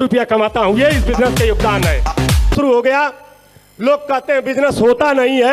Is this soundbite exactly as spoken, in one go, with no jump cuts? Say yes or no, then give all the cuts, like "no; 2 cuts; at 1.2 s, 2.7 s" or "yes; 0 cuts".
no; 1 cut; at 2.5 s